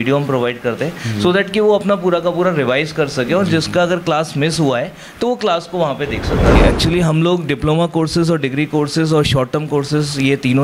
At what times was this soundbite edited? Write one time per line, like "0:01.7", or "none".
0:06.6